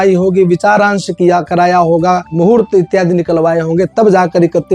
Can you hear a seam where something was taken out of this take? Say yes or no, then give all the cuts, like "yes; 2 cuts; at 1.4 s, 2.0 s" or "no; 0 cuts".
no; 0 cuts